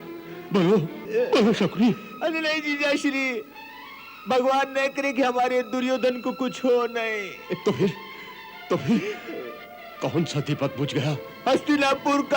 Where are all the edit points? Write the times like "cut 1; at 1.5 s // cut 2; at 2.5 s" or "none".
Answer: cut 1; at 1.0 s // cut 2; at 7.4 s // cut 3; at 11.3 s